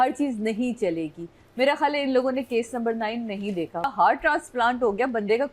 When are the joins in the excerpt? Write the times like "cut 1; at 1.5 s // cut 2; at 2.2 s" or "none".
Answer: cut 1; at 3.9 s